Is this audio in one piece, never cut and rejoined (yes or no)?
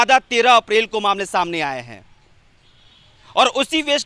yes